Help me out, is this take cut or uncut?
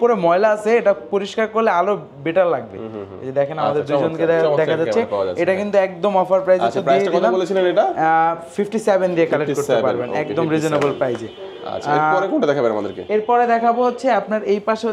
uncut